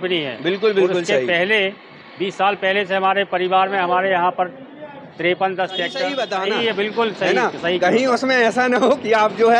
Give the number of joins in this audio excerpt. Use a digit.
1